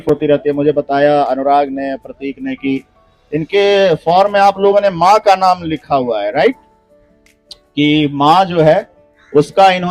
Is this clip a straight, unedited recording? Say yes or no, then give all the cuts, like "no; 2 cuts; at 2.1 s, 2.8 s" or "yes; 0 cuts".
yes; 0 cuts